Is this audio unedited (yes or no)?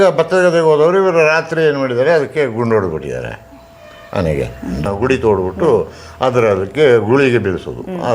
no